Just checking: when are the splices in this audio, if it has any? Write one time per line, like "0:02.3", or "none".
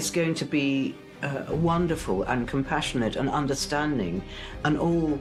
none